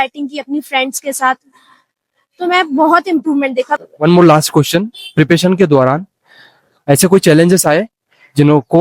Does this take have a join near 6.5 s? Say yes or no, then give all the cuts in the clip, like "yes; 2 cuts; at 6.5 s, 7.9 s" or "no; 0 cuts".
no; 1 cut; at 3.8 s